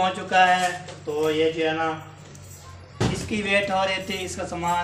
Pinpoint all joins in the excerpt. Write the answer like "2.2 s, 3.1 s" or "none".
none